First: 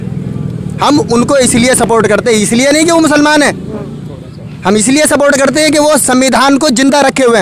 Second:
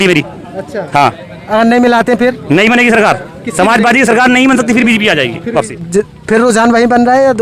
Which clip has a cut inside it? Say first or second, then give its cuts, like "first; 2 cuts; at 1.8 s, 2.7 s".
second; 1 cut; at 5.7 s